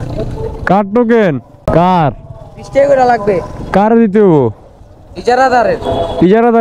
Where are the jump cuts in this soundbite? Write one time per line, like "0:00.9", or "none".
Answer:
0:01.5